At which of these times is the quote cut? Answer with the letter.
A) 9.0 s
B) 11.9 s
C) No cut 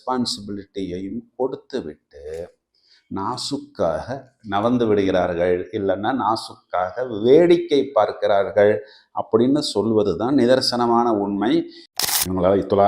B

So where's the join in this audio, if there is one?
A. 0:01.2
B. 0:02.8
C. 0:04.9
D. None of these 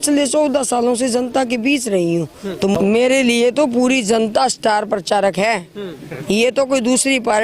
B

